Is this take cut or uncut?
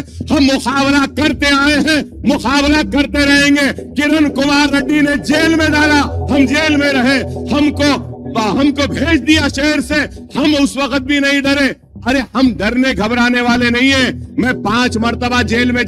uncut